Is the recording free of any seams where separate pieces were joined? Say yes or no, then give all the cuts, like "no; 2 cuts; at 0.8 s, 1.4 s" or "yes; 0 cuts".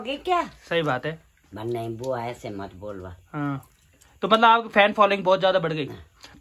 yes; 0 cuts